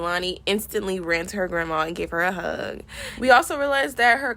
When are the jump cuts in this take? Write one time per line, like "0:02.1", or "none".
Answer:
none